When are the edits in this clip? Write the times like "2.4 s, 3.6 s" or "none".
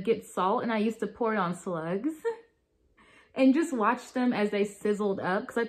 none